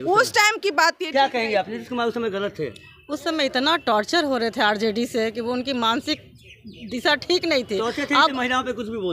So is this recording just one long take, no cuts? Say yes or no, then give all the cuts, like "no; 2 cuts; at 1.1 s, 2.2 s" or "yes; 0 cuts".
yes; 0 cuts